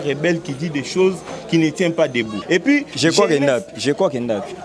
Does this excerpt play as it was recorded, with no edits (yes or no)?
no